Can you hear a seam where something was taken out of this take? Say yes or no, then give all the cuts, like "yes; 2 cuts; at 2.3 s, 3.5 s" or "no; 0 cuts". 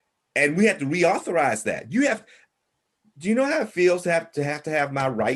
no; 0 cuts